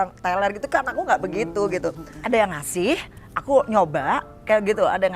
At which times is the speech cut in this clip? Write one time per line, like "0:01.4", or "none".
0:02.1